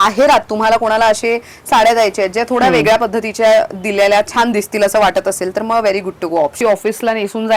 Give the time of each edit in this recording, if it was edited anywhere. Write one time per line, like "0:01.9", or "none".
0:06.6